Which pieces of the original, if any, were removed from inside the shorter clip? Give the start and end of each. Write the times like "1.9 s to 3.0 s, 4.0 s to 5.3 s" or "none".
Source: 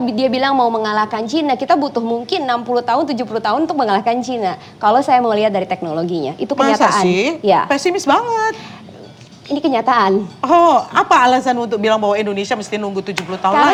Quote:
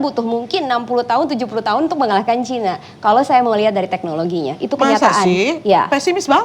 none